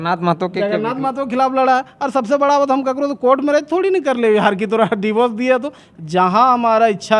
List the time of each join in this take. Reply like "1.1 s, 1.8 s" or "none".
none